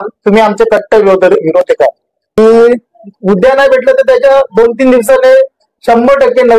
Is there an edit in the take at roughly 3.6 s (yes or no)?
no